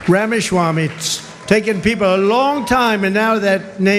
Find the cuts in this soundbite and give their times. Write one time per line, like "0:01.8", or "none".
none